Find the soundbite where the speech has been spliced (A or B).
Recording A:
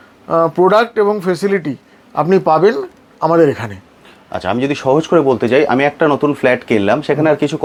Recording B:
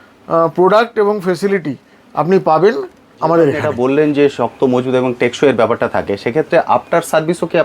B